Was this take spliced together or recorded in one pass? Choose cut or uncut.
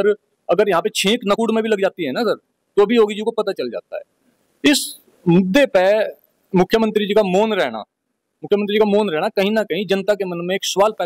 uncut